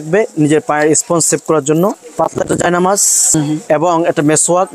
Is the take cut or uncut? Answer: cut